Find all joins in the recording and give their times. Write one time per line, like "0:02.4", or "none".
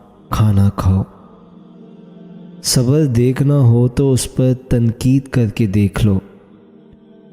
0:01.2
0:02.6